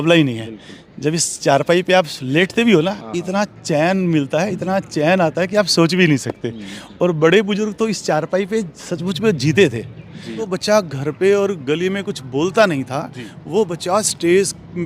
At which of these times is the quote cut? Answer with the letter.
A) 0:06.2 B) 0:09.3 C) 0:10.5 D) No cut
C